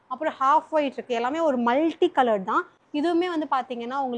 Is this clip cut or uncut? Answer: uncut